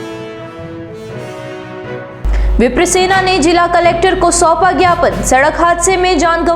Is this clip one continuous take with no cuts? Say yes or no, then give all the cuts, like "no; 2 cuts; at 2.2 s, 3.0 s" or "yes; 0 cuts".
no; 1 cut; at 2.0 s